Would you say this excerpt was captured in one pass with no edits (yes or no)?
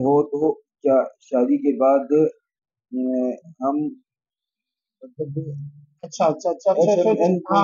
yes